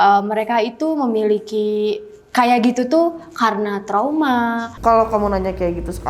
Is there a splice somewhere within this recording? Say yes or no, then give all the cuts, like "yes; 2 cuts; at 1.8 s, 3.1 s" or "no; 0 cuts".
yes; 1 cut; at 4.7 s